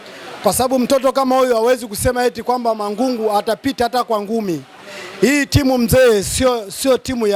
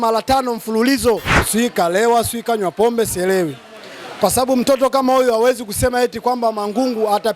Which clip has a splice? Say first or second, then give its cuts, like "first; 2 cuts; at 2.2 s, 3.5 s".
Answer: second; 1 cut; at 1.4 s